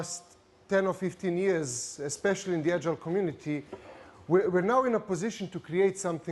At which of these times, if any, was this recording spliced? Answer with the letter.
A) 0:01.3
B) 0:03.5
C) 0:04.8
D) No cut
B